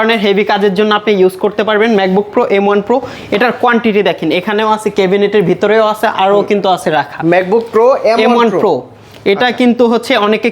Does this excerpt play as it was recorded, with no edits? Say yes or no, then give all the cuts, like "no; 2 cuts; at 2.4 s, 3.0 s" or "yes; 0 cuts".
yes; 0 cuts